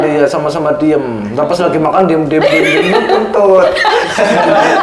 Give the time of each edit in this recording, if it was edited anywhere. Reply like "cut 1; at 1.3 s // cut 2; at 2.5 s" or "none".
none